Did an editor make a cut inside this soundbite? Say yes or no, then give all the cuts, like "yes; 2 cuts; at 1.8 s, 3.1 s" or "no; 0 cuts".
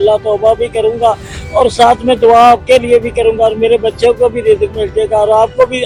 no; 0 cuts